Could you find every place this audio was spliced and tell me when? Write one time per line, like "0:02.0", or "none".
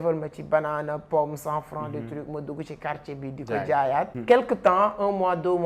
0:04.1